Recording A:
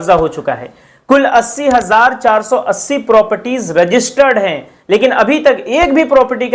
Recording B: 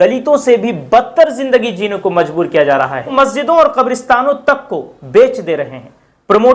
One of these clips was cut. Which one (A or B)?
B